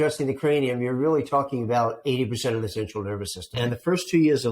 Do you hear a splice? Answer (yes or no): yes